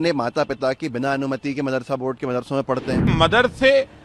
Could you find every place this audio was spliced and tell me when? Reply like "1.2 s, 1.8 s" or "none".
3.1 s

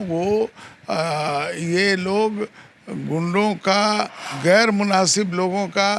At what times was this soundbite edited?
4.3 s

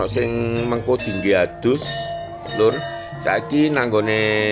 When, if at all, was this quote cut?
none

